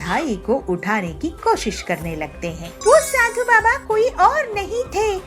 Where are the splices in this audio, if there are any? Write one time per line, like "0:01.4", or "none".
0:02.7